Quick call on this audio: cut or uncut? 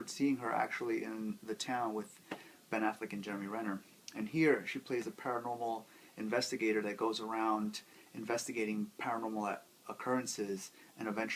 uncut